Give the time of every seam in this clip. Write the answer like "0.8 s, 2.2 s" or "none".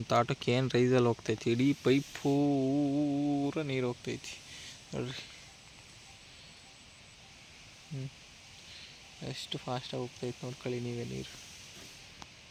none